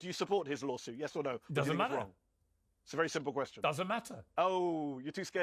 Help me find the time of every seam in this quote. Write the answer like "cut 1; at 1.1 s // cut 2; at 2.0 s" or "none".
none